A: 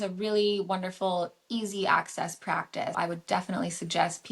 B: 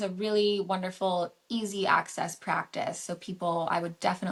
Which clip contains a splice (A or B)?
A